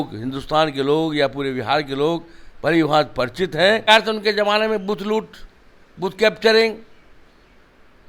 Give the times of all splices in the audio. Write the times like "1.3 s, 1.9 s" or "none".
3.9 s